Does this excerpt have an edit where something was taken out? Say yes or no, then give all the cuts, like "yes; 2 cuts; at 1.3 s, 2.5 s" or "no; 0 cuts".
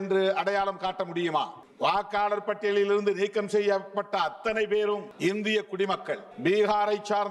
yes; 3 cuts; at 1.6 s, 5.1 s, 6.3 s